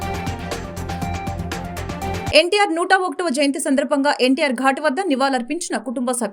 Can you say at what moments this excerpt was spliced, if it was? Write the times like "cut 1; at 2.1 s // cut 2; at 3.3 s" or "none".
cut 1; at 2.3 s

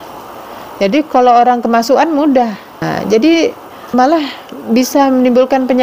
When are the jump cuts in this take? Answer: cut 1; at 2.9 s // cut 2; at 3.9 s

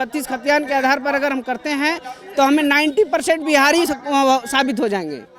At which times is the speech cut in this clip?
none

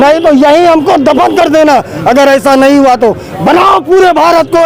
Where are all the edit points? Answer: none

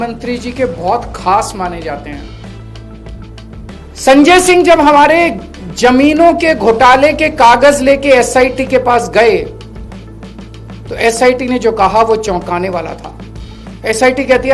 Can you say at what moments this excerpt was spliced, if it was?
cut 1; at 3.7 s

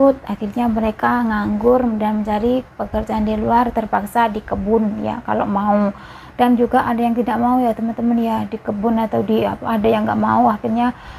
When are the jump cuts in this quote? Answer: none

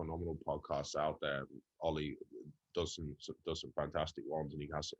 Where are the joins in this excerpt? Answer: none

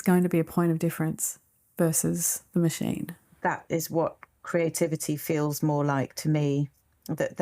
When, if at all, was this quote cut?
cut 1; at 3.2 s

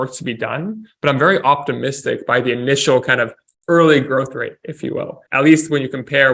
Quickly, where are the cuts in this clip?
cut 1; at 5.2 s

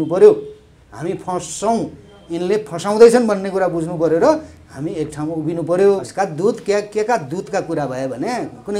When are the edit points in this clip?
cut 1; at 6.1 s

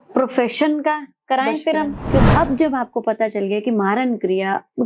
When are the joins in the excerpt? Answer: cut 1; at 2.3 s

